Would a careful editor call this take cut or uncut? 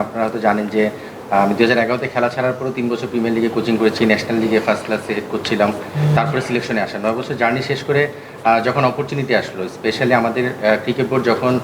uncut